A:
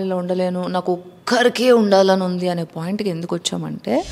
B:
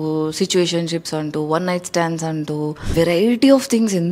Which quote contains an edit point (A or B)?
B